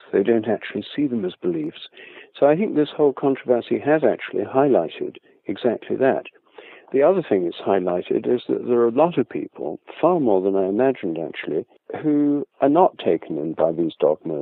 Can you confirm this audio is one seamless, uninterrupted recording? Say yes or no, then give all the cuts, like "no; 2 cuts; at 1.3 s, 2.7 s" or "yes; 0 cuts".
yes; 0 cuts